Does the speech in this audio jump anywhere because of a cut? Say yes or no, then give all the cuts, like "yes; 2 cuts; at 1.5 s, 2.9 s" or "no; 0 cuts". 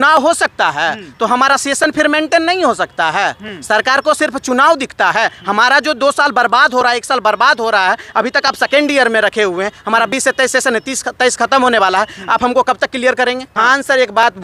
yes; 1 cut; at 13.5 s